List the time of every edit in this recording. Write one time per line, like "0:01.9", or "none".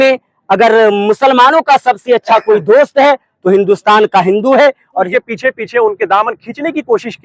0:04.9